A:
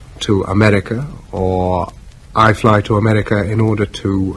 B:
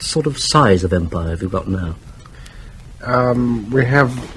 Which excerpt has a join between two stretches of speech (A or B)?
A